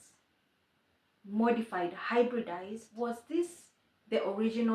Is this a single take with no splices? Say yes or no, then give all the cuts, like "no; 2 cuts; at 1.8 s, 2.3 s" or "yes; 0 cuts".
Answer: no; 1 cut; at 2.9 s